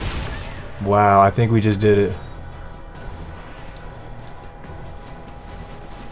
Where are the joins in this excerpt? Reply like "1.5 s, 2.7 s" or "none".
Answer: none